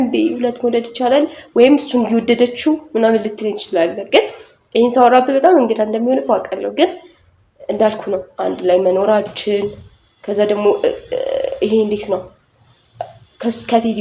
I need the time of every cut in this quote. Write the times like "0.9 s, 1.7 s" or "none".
none